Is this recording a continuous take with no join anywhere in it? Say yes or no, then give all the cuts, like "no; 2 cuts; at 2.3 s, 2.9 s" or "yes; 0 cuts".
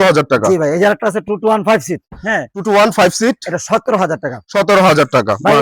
yes; 0 cuts